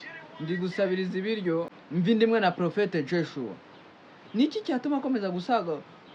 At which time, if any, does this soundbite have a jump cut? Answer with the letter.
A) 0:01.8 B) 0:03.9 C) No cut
A